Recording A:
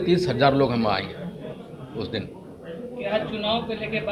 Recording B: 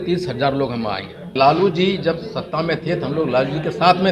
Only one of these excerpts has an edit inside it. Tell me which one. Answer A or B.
B